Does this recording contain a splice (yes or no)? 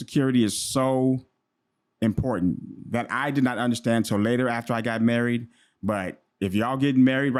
no